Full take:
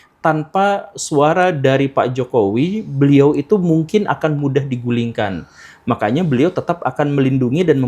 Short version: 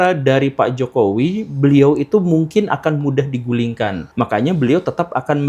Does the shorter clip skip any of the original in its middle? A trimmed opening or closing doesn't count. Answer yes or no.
yes